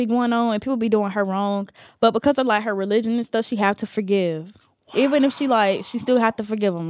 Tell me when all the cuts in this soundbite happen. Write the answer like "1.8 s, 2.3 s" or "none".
none